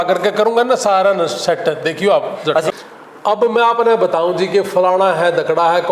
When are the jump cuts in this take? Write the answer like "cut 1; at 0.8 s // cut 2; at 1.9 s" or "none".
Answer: cut 1; at 2.7 s